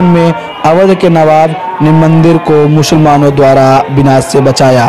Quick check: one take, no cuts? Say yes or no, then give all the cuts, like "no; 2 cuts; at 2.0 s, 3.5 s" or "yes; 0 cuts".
yes; 0 cuts